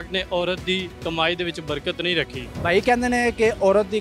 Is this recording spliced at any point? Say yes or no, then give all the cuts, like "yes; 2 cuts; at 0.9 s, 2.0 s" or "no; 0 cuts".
yes; 2 cuts; at 0.9 s, 2.4 s